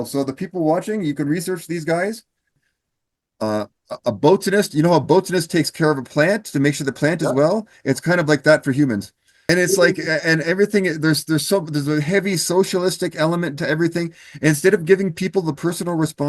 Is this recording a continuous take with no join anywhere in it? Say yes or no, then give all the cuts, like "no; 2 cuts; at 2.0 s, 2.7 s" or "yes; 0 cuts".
no; 2 cuts; at 2.7 s, 9.4 s